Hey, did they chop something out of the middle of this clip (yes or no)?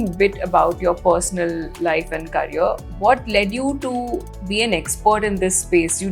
no